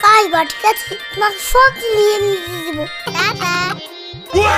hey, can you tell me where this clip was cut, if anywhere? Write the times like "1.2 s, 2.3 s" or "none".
3.1 s